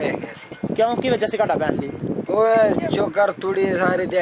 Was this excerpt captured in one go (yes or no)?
yes